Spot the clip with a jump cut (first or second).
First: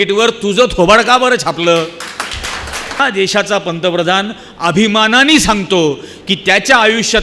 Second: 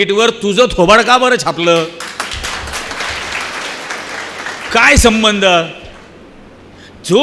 first